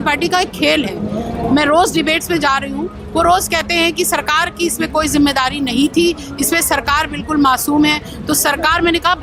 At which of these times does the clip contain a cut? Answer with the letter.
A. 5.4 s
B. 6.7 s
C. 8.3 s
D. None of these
D